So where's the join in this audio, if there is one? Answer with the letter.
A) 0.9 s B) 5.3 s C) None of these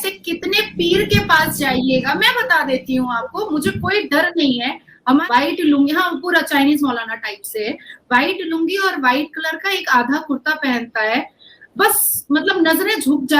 B